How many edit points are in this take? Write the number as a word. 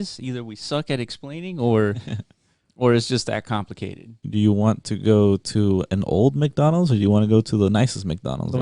one